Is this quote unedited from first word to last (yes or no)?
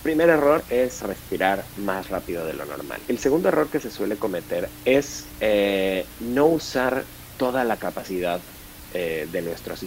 no